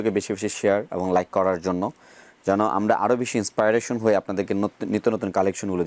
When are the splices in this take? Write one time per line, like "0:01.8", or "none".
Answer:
none